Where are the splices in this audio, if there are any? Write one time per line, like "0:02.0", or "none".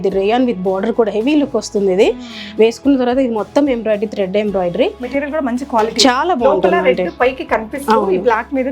none